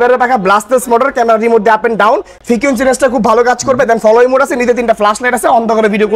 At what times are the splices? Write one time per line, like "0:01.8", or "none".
none